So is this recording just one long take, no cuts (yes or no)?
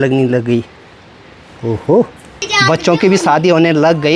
no